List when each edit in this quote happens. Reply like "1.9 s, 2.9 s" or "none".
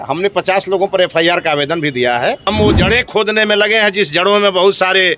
2.5 s